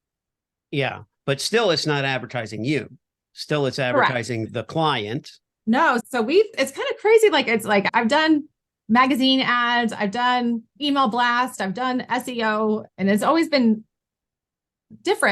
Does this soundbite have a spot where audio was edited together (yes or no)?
yes